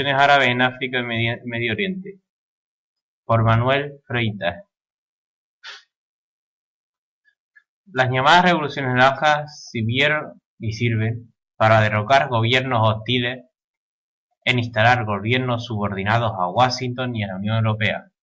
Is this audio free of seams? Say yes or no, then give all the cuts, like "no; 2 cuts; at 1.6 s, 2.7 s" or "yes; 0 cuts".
yes; 0 cuts